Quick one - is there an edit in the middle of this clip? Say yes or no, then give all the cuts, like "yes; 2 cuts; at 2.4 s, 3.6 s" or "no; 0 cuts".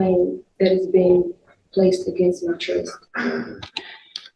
no; 0 cuts